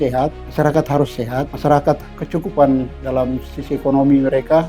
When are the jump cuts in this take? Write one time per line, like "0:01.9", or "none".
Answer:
0:02.2